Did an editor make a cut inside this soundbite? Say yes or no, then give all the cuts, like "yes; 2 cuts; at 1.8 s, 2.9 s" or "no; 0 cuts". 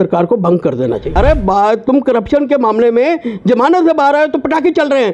yes; 1 cut; at 1.1 s